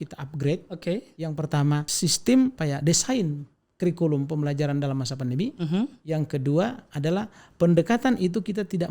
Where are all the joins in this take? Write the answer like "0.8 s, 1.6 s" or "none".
1.9 s, 2.6 s